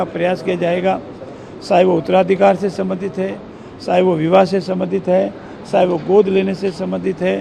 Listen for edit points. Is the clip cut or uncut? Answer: uncut